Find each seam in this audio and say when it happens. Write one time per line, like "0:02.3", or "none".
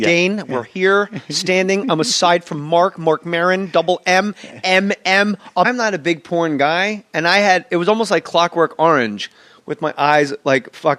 none